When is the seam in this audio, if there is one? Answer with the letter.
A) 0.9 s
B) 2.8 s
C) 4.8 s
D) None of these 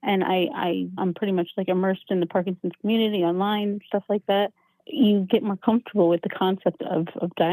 A